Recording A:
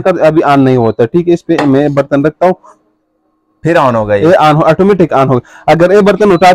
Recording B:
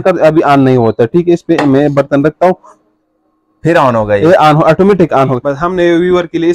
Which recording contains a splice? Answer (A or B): B